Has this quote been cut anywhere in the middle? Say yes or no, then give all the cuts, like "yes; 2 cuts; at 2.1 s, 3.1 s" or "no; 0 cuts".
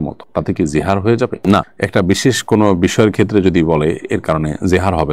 no; 0 cuts